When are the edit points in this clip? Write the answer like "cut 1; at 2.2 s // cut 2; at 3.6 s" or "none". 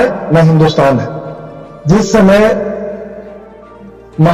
none